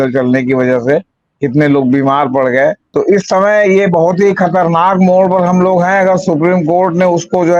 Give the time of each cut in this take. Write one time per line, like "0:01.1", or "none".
0:02.8